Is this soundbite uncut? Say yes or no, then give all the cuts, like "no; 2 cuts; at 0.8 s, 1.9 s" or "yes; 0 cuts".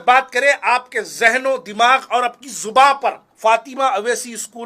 no; 1 cut; at 3.2 s